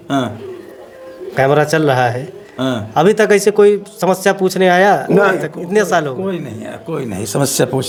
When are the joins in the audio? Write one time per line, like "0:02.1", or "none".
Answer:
none